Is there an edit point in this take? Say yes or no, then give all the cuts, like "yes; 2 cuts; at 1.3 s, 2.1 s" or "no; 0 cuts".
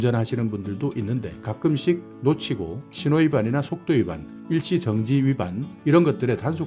yes; 2 cuts; at 1.4 s, 2.2 s